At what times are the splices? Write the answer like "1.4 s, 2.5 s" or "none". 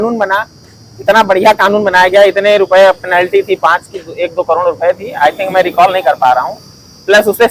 none